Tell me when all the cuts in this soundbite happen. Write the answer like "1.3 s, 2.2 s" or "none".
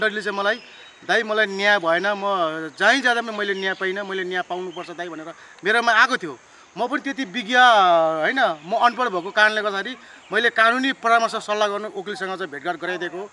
none